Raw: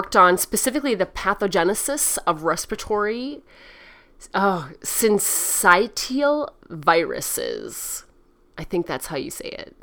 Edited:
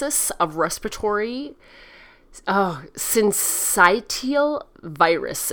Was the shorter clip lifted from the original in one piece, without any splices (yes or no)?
yes